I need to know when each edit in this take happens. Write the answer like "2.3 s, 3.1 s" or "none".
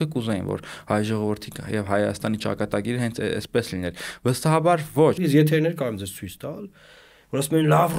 5.2 s